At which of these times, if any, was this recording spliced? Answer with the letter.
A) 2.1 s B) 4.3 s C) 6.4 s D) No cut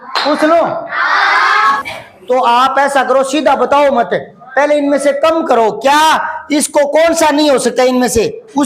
A